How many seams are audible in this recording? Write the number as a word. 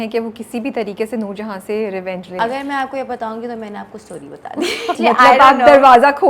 two